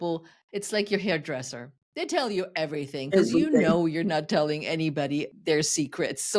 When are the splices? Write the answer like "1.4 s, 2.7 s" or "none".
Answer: 5.3 s